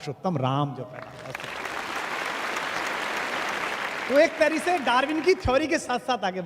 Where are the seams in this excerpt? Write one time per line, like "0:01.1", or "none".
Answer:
none

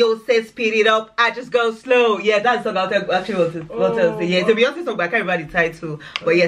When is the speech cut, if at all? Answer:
none

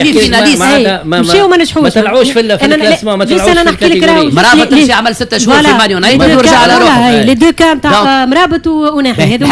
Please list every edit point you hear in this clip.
none

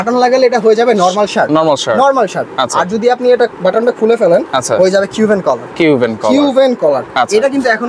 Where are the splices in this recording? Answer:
none

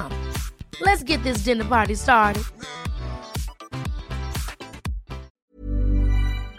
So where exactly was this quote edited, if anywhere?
0:05.4

